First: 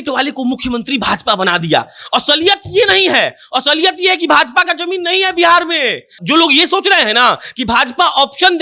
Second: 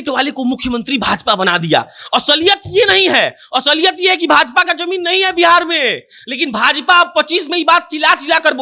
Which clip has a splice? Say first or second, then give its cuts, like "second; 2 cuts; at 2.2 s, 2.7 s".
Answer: first; 1 cut; at 6.2 s